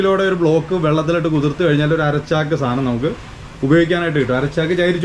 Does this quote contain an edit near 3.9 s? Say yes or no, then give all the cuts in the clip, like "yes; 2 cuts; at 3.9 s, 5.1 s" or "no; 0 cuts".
no; 0 cuts